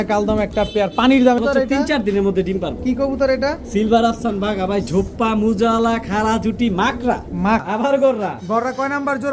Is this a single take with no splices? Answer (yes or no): no